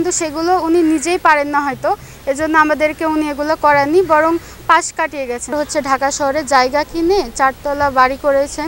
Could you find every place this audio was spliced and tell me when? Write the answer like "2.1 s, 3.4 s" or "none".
5.5 s